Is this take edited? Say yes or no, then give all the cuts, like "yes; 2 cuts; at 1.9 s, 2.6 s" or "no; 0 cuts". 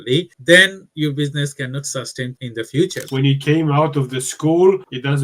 yes; 1 cut; at 3.0 s